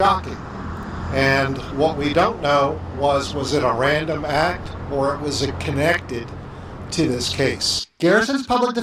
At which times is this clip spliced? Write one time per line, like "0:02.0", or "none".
none